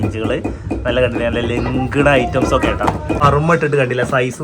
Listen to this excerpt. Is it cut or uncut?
cut